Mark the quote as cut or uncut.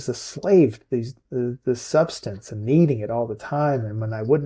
uncut